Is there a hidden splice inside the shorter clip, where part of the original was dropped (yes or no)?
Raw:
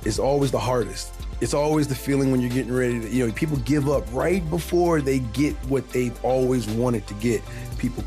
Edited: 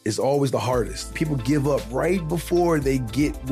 yes